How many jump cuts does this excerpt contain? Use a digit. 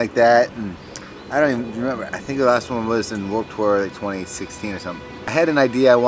1